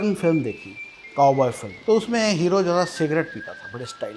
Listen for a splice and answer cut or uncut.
cut